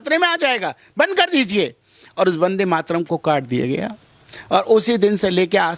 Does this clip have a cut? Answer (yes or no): no